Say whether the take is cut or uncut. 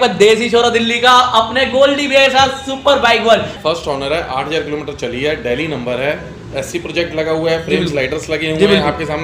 cut